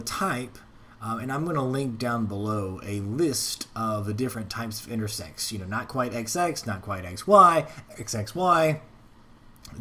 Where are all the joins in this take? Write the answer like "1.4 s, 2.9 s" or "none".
none